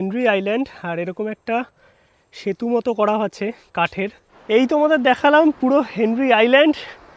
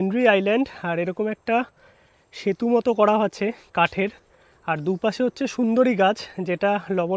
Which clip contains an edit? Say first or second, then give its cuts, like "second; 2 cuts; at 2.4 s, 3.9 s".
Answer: first; 1 cut; at 4.3 s